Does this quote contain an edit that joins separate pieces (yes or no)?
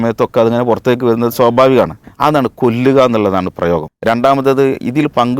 yes